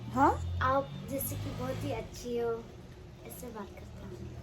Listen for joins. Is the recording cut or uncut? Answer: uncut